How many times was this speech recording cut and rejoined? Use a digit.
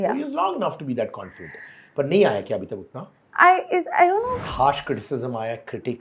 1